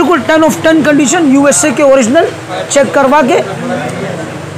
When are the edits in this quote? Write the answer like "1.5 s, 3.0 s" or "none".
none